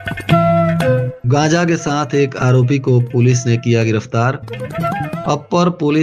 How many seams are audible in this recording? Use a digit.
1